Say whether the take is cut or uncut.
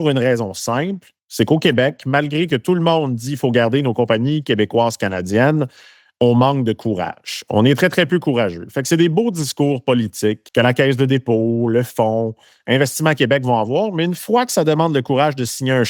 uncut